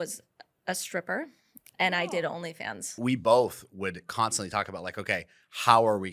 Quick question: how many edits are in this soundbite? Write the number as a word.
one